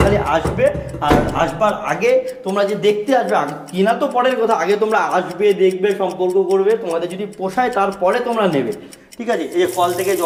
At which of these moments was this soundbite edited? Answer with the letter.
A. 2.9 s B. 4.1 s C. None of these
C